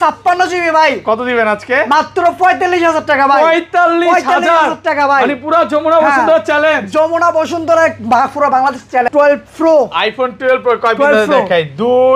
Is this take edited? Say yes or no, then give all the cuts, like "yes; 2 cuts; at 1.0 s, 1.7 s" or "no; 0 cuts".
yes; 1 cut; at 9.1 s